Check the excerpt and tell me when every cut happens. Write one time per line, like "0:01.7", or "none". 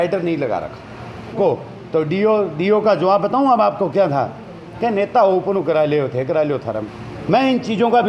0:01.4
0:06.8